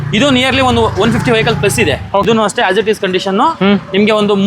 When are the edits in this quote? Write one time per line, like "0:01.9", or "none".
0:02.2